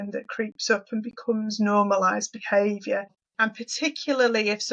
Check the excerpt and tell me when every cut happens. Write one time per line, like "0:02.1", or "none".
0:03.2